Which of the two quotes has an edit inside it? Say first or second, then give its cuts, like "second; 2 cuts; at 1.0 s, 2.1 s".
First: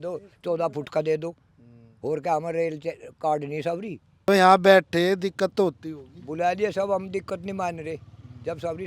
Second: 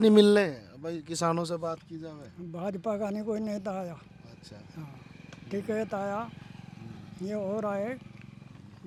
first; 1 cut; at 4.3 s